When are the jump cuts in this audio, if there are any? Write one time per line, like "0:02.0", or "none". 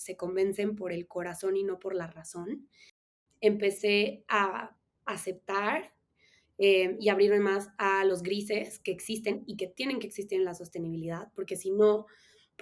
0:03.1